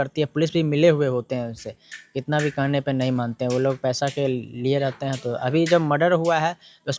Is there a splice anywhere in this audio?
no; 0 cuts

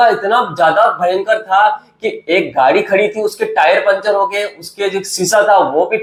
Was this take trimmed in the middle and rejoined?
no; 0 cuts

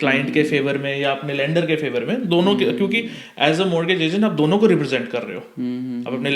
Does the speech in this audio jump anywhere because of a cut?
no; 0 cuts

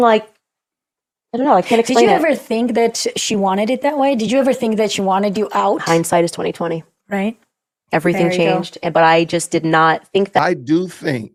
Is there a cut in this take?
no; 0 cuts

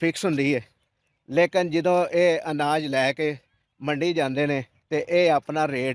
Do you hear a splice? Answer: yes; 1 cut; at 4.7 s

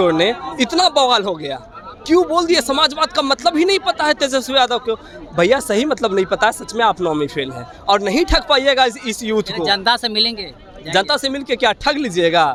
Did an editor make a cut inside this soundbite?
no; 0 cuts

